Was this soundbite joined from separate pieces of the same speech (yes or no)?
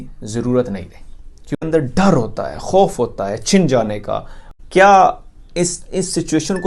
yes